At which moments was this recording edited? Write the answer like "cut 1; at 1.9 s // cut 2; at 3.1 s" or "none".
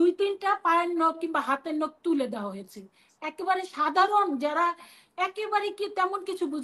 none